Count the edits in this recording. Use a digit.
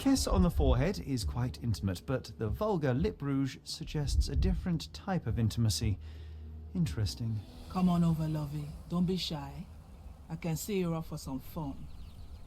2